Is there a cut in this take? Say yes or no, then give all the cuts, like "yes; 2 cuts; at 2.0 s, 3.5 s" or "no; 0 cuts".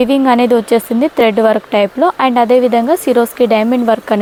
no; 0 cuts